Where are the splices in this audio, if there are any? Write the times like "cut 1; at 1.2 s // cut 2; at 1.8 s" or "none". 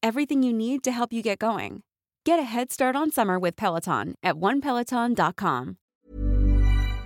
cut 1; at 5.8 s